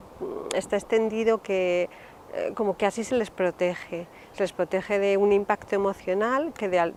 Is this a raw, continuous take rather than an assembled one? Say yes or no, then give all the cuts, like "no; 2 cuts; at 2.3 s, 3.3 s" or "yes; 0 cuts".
yes; 0 cuts